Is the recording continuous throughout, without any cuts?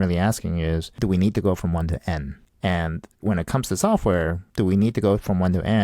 no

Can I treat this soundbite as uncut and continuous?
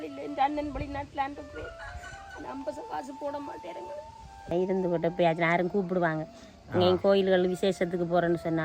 no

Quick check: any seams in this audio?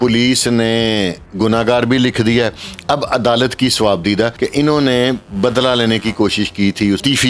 yes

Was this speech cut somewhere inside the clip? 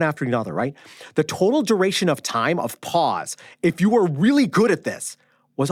no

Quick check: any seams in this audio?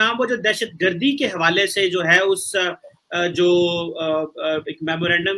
no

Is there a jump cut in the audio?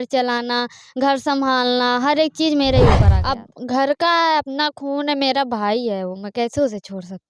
yes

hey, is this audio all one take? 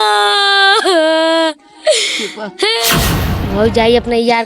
no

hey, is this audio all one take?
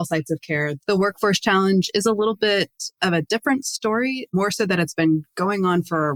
yes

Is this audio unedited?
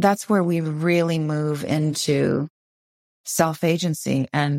yes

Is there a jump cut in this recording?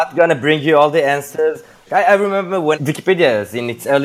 yes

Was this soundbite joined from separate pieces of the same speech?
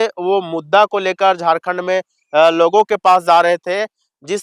no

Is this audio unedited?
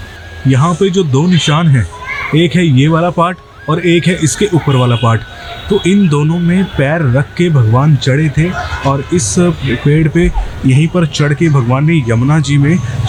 yes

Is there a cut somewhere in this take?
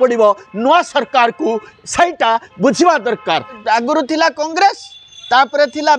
yes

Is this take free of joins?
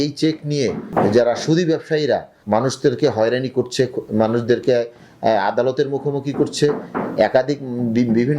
no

